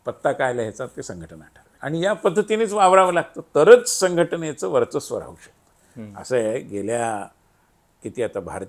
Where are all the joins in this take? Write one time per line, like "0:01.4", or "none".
none